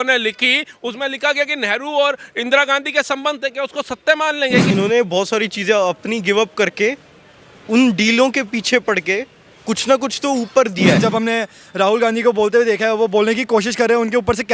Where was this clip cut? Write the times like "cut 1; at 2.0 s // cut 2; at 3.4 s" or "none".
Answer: cut 1; at 4.7 s // cut 2; at 11.0 s